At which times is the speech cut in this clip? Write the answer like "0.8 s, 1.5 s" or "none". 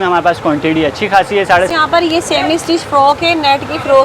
1.7 s

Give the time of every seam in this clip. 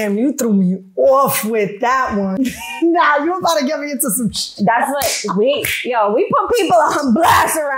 2.4 s

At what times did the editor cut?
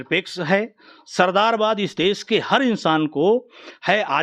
none

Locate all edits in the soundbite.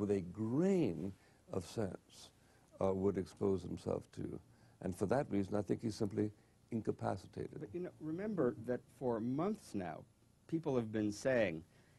none

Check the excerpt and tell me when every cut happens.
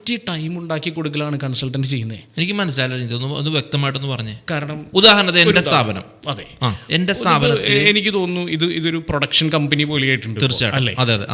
none

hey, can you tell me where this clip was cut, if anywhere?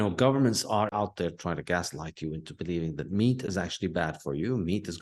0.9 s

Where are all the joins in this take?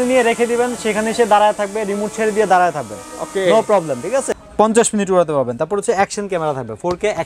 4.4 s

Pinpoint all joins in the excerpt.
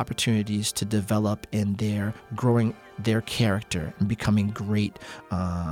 none

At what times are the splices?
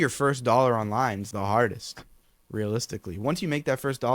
1.2 s

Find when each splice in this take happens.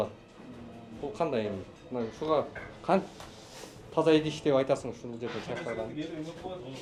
none

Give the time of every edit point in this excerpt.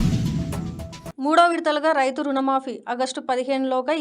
1.0 s

